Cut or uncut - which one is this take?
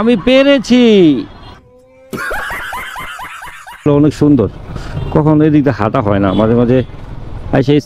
cut